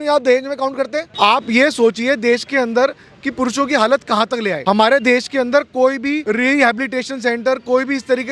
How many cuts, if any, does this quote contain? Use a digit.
3